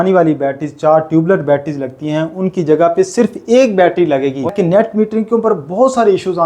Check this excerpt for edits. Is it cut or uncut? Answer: cut